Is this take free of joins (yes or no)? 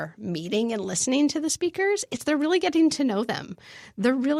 yes